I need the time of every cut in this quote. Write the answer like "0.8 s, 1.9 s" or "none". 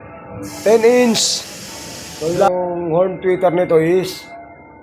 2.5 s